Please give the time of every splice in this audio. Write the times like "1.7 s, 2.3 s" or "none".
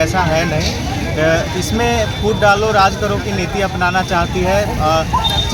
none